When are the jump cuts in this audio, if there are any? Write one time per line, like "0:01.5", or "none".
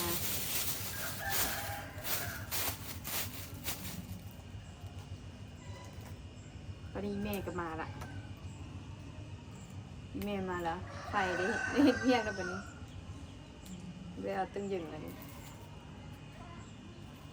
none